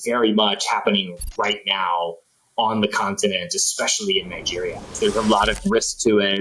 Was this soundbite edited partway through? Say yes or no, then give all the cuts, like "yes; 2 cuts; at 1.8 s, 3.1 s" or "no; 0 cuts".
yes; 1 cut; at 4.9 s